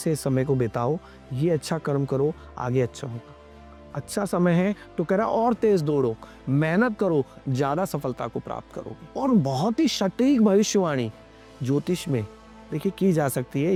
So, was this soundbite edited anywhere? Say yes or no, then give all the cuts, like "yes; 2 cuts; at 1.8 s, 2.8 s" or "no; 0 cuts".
no; 0 cuts